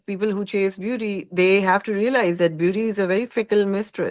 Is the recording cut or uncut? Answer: uncut